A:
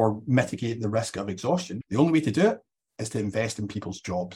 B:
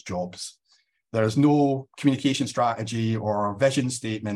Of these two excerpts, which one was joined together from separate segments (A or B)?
A